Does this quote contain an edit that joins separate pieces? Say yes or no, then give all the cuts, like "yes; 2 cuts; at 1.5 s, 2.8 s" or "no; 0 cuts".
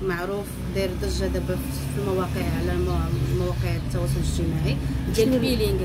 no; 0 cuts